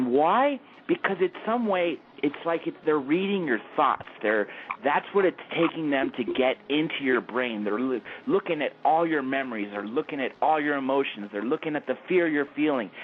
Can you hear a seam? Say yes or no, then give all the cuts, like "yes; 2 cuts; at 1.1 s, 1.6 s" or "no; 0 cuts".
no; 0 cuts